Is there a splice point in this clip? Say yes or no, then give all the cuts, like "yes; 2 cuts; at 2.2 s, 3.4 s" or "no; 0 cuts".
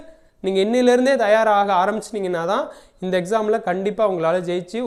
no; 0 cuts